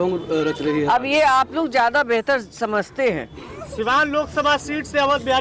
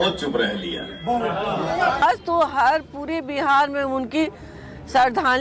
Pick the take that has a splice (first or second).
second